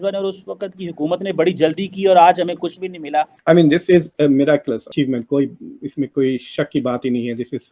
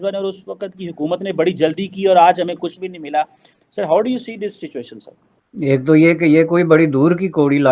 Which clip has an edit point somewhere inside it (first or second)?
first